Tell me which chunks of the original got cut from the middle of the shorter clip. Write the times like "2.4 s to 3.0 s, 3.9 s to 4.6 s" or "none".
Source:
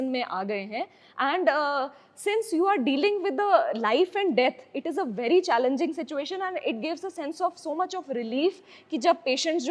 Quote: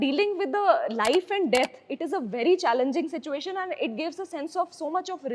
none